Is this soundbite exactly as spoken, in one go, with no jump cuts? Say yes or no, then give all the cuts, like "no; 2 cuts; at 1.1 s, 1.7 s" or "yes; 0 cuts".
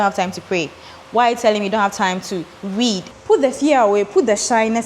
no; 1 cut; at 3.1 s